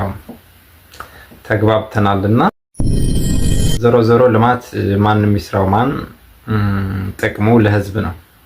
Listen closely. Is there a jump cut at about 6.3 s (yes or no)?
no